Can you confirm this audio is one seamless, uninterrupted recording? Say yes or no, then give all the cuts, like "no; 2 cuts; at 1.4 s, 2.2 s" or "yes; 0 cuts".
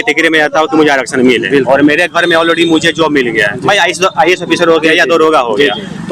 yes; 0 cuts